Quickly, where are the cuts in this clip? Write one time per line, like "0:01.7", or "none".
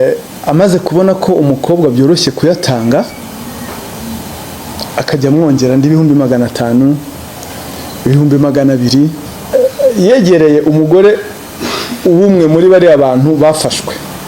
0:09.5